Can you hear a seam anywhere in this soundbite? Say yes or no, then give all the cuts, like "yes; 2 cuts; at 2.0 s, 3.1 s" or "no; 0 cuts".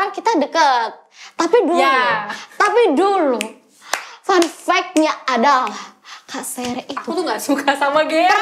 no; 0 cuts